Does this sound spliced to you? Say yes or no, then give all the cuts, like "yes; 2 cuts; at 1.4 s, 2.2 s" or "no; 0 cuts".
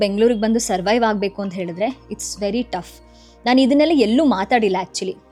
no; 0 cuts